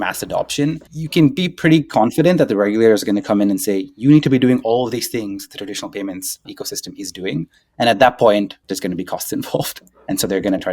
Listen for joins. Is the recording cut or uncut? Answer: cut